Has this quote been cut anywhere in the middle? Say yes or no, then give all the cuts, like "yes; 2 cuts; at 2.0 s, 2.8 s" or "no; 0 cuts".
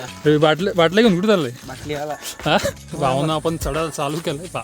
yes; 1 cut; at 2.8 s